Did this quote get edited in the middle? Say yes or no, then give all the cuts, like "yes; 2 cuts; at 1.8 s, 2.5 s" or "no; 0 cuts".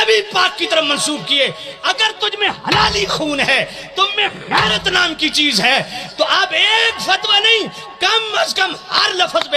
no; 0 cuts